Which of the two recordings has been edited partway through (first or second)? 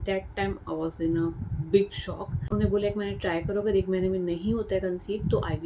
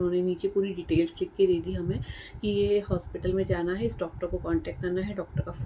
first